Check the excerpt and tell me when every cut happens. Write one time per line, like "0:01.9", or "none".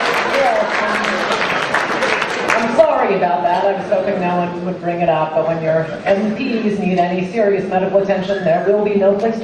0:02.6

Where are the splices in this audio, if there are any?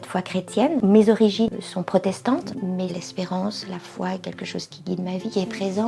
0:01.5
0:02.9

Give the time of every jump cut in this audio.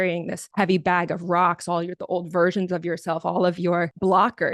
none

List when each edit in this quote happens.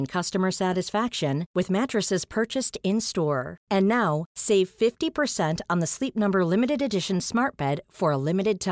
none

